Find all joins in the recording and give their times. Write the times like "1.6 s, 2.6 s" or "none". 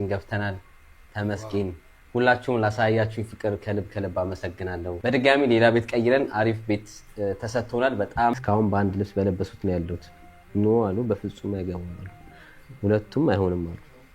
8.3 s